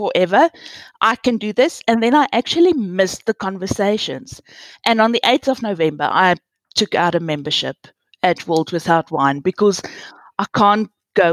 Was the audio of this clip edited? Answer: no; 0 cuts

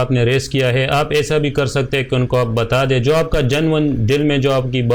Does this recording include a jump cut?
no; 0 cuts

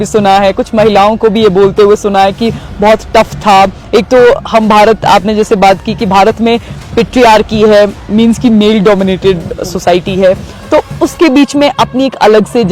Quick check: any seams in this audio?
no; 0 cuts

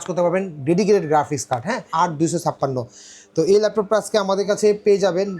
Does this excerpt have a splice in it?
yes; 1 cut; at 1.9 s

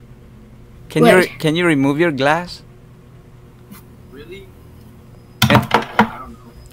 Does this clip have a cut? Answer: no; 0 cuts

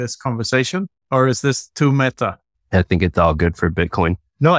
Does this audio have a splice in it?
yes; 1 cut; at 1.0 s

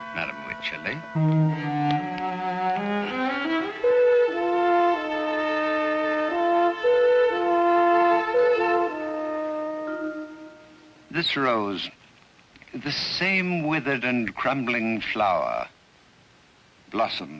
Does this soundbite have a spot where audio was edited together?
no; 0 cuts

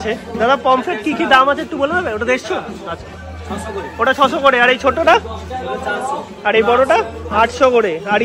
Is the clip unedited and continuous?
yes; 0 cuts

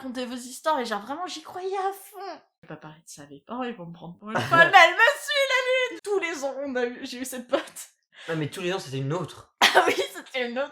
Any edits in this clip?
yes; 2 cuts; at 2.6 s, 5.9 s

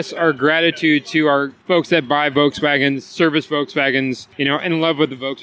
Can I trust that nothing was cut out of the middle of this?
no; 2 cuts; at 1.5 s, 4.3 s

